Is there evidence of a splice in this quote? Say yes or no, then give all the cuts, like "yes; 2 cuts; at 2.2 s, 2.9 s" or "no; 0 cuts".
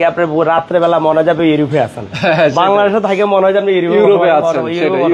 no; 0 cuts